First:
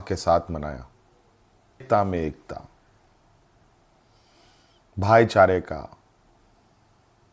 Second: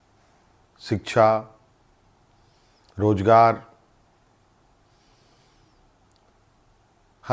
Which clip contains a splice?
first; 1 cut; at 1.8 s

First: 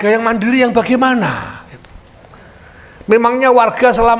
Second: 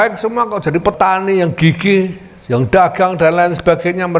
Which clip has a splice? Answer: second; 1 cut; at 0.9 s

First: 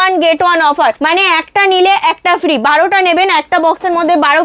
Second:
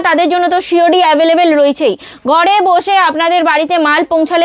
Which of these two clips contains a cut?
first; 1 cut; at 1.0 s

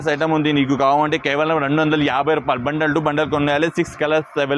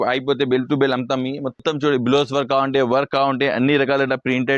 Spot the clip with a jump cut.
second; 1 cut; at 1.6 s

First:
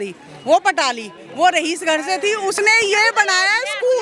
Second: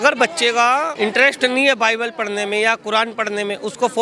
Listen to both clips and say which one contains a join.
second; 1 cut; at 0.9 s

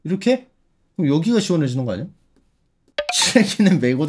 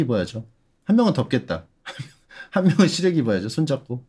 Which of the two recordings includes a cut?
first; 1 cut; at 3.0 s

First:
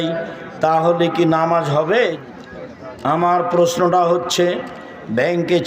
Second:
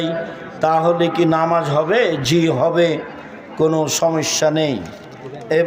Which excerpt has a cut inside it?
first; 1 cut; at 2.2 s

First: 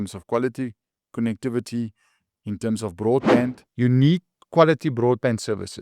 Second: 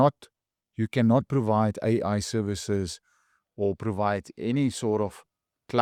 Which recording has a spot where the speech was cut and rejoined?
first; 1 cut; at 3.6 s

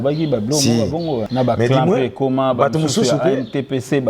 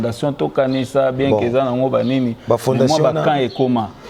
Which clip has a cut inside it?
first; 1 cut; at 1.3 s

